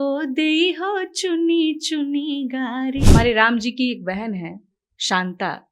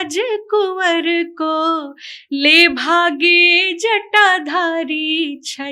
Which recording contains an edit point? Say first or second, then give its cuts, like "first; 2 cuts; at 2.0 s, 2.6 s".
first; 1 cut; at 3.0 s